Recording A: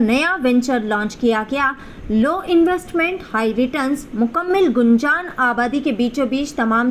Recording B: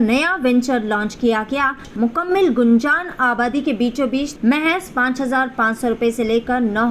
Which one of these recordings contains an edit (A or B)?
B